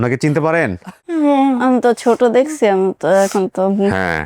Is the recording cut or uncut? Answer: cut